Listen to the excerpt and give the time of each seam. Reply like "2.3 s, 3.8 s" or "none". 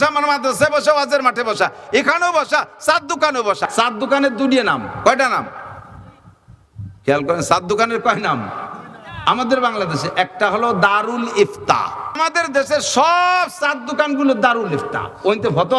3.7 s, 12.2 s